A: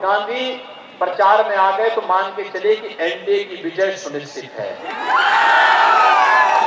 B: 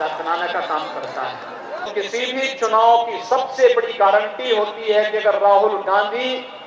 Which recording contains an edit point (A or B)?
B